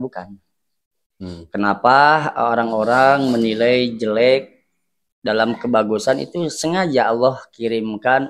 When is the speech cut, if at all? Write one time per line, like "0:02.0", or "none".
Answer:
none